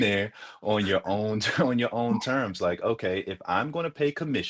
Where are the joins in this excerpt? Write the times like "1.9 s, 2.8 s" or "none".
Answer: none